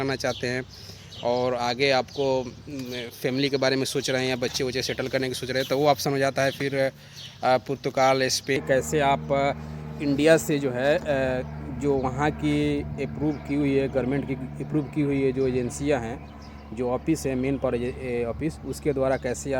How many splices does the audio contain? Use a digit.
1